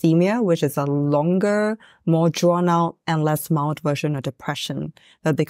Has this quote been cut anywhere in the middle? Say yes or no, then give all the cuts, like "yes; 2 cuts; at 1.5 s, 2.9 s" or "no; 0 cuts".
no; 0 cuts